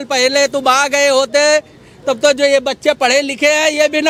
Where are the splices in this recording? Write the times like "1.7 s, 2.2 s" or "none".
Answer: none